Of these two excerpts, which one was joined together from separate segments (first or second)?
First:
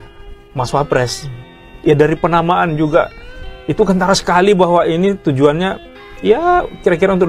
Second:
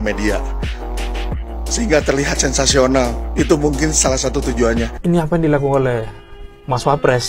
second